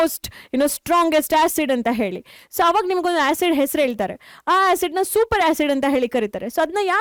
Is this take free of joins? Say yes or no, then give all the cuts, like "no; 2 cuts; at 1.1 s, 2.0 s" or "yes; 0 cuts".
yes; 0 cuts